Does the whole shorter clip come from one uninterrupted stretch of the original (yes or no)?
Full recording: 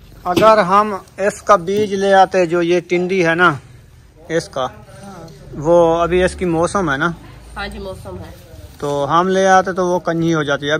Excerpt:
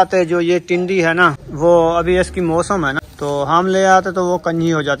no